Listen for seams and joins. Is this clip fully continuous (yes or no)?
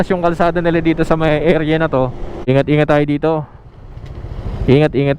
no